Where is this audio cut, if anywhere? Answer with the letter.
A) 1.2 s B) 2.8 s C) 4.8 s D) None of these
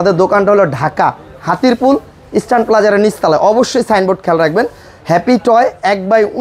D